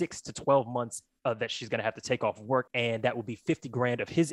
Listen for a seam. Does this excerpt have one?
yes; 1 cut; at 2.7 s

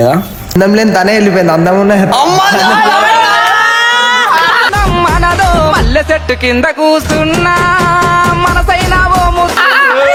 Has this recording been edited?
no; 0 cuts

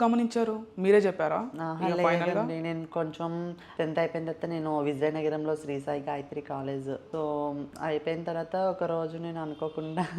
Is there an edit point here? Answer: yes; 2 cuts; at 3.6 s, 7.0 s

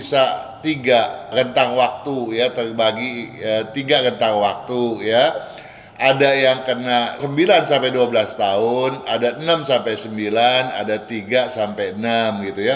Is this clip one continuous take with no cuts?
yes; 0 cuts

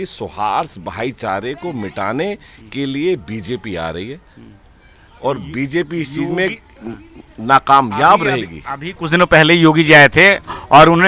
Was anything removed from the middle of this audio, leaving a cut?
no; 0 cuts

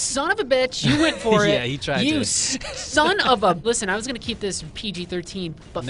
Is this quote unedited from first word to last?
no; 1 cut; at 3.6 s

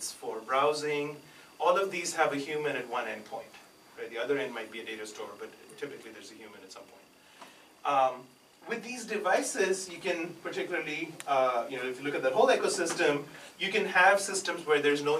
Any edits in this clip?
no; 0 cuts

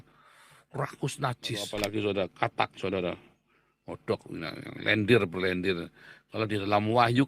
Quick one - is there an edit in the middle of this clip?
yes; 1 cut; at 1.7 s

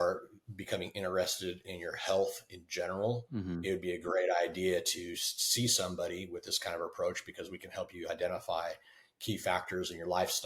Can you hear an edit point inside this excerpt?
no; 0 cuts

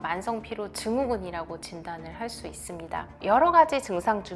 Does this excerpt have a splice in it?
yes; 1 cut; at 3.1 s

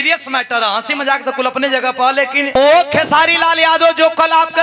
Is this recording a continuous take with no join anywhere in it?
no; 1 cut; at 2.6 s

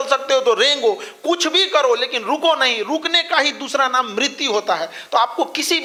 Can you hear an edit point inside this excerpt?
no; 0 cuts

